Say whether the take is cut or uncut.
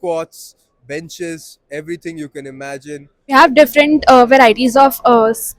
cut